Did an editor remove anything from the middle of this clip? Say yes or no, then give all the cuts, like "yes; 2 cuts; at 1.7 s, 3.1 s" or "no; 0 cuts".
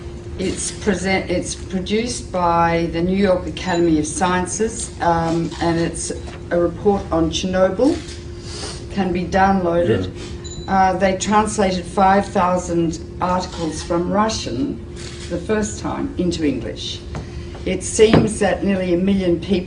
no; 0 cuts